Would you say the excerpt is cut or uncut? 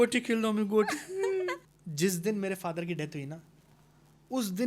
cut